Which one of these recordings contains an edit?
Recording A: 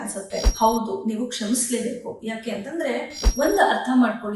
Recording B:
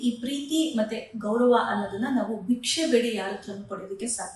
A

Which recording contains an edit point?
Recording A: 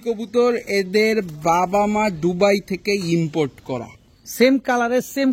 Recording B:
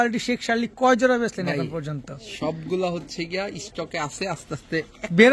A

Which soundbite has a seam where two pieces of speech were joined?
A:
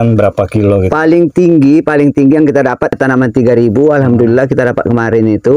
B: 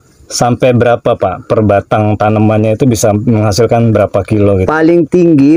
A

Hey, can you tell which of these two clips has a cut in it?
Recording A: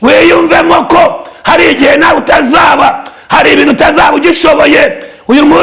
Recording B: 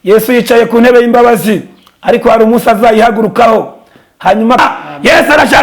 B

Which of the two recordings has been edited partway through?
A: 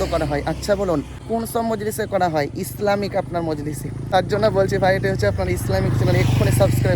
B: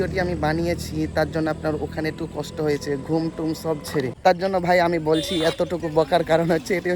B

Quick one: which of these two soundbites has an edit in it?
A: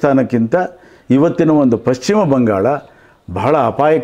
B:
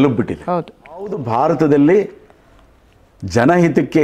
B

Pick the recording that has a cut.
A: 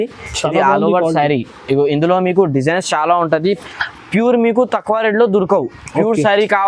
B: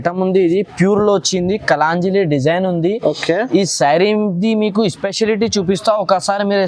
A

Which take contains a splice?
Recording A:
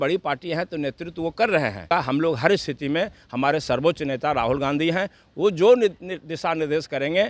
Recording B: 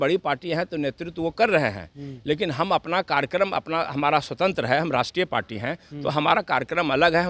A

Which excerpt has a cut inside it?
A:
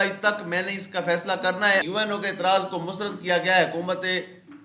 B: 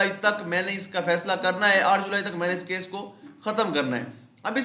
A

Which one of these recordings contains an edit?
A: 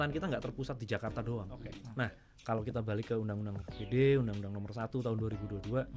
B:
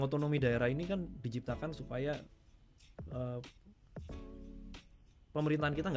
A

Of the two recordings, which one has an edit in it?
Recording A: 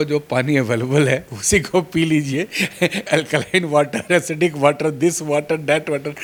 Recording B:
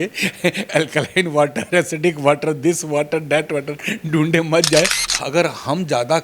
B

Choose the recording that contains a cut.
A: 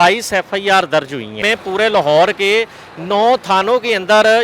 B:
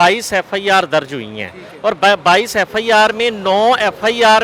A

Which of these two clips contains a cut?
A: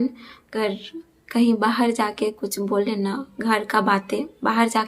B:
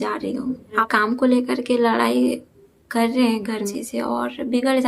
B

